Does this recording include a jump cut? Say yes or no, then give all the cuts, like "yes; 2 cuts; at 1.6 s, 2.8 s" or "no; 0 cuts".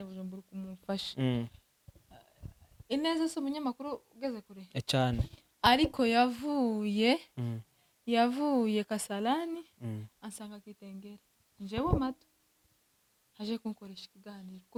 no; 0 cuts